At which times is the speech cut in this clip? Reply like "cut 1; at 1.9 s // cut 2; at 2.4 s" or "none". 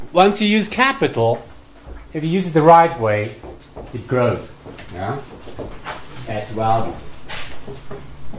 cut 1; at 2.8 s